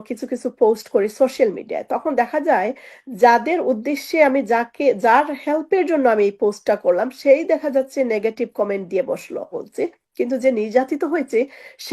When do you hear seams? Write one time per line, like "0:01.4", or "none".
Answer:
0:09.6